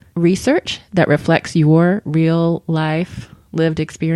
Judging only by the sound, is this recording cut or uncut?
uncut